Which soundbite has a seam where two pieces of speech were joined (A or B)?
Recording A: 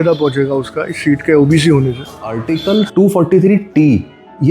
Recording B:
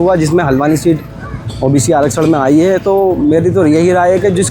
A